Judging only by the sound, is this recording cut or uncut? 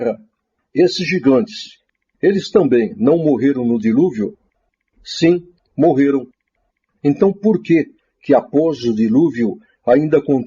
cut